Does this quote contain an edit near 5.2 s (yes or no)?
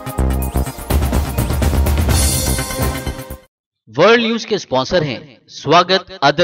no